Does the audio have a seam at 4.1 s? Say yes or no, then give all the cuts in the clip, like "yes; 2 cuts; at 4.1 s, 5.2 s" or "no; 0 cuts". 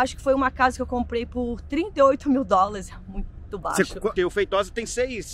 yes; 1 cut; at 4.1 s